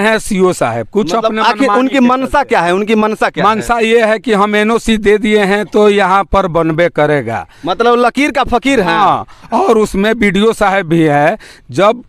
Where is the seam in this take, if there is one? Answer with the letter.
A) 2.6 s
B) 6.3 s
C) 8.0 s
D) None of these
D